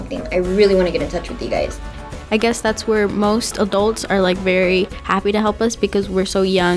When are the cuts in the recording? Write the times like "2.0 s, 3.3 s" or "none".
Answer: 2.1 s